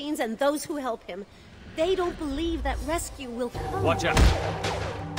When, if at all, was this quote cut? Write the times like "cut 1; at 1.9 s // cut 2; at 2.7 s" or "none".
none